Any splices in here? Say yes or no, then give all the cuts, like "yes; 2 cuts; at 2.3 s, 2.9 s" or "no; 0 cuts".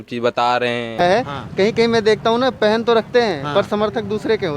yes; 1 cut; at 0.9 s